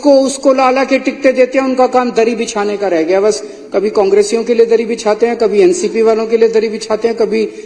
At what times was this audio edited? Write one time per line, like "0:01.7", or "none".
none